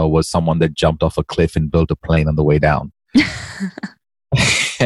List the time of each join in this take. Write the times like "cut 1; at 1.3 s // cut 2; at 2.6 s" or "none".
none